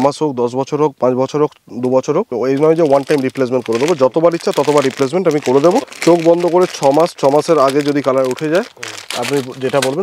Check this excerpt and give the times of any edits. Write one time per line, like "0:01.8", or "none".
0:02.3
0:05.9